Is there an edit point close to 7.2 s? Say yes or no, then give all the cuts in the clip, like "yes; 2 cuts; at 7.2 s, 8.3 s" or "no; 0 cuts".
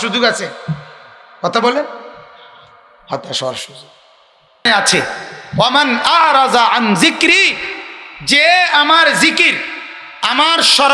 no; 1 cut; at 4.7 s